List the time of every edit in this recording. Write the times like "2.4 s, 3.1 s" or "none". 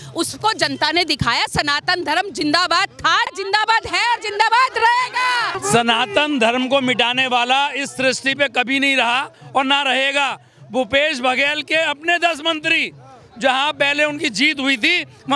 3.3 s, 5.6 s